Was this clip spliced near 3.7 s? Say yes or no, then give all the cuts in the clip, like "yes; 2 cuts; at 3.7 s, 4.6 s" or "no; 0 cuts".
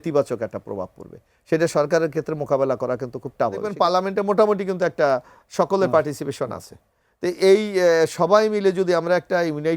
yes; 1 cut; at 3.7 s